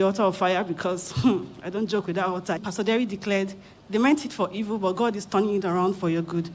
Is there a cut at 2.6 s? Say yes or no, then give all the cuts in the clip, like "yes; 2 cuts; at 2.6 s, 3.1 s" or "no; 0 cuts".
yes; 1 cut; at 2.6 s